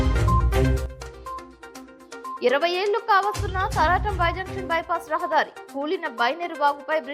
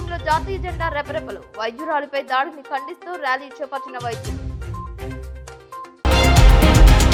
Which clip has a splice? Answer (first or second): first